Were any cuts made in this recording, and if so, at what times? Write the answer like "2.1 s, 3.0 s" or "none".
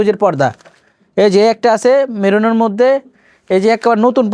none